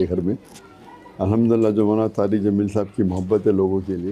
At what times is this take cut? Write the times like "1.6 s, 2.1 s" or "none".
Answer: none